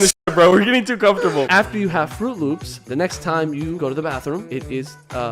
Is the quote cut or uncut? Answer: cut